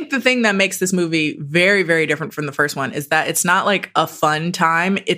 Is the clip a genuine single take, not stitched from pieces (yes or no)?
yes